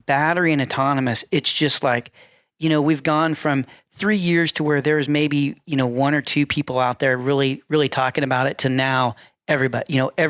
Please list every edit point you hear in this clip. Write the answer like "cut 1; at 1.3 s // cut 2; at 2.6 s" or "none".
none